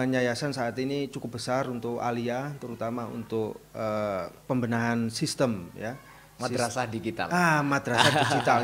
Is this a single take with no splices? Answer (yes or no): no